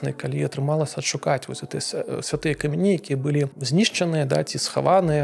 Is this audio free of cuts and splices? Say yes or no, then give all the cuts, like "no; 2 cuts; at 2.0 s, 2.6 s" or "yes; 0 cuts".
no; 1 cut; at 3.6 s